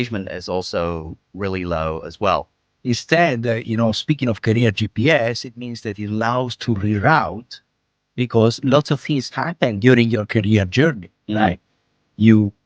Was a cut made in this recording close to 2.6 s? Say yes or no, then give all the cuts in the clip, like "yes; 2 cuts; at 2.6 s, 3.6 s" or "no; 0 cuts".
yes; 1 cut; at 2.6 s